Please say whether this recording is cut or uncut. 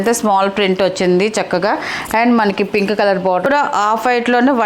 cut